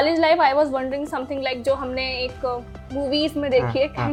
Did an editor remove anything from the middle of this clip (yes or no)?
no